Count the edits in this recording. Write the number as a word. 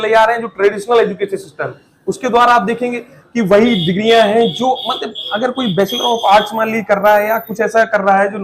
zero